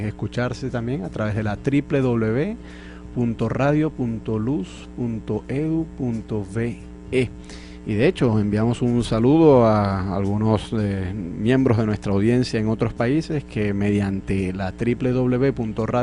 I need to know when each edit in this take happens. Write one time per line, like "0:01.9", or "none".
none